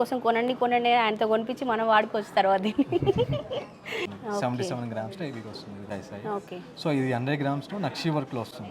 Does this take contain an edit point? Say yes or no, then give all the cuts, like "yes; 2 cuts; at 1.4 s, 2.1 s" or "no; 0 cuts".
yes; 2 cuts; at 4.0 s, 5.9 s